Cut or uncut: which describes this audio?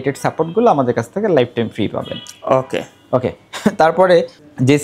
uncut